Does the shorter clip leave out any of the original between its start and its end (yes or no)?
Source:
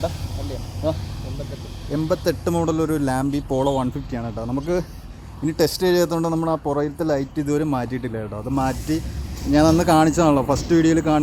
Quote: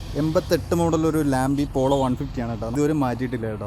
yes